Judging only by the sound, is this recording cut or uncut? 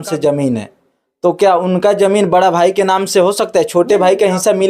uncut